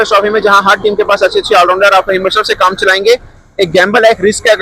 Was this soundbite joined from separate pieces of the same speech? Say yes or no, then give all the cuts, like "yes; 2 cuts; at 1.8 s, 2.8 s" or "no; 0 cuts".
no; 0 cuts